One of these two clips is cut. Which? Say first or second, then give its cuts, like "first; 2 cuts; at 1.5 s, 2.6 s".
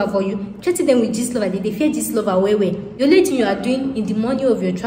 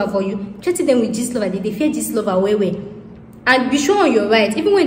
first; 1 cut; at 2.9 s